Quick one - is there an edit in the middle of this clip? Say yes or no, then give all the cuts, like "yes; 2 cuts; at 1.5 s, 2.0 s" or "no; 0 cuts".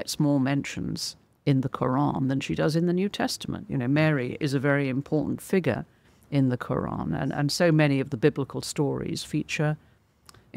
no; 0 cuts